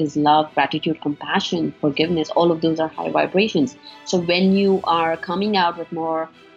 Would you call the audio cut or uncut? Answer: uncut